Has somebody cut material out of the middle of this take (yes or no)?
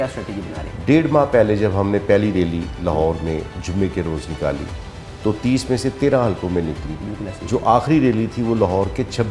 no